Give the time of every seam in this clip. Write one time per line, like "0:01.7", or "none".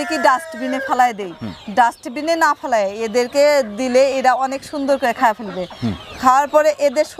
none